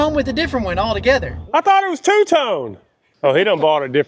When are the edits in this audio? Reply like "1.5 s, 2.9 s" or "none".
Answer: 1.4 s, 3.0 s